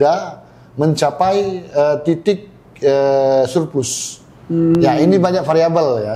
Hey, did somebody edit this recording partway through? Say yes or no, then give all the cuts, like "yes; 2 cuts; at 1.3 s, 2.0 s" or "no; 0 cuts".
no; 0 cuts